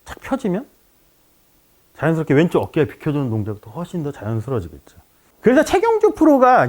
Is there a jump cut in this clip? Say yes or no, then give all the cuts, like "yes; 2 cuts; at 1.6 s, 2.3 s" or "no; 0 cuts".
yes; 1 cut; at 5.2 s